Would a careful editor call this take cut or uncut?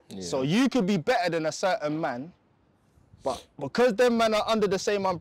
uncut